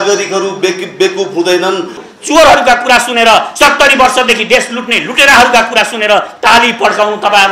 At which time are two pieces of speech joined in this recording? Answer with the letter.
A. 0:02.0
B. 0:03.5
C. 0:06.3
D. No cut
A